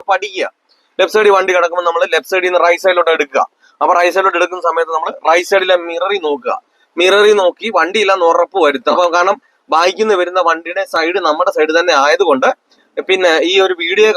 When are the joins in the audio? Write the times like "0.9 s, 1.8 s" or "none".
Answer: 9.0 s